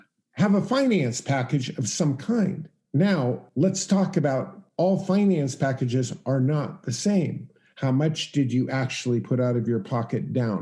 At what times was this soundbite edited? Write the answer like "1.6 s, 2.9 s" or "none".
2.7 s, 3.4 s, 4.6 s